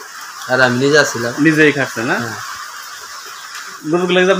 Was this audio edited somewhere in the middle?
yes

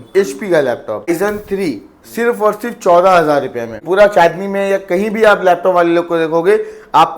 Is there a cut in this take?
yes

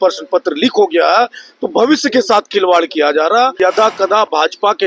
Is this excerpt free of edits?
no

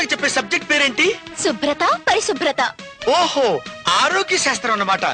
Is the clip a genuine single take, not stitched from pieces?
yes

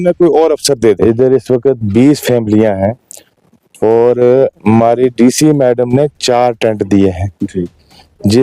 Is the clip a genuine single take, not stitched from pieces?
no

